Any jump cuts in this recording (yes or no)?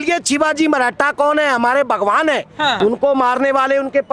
yes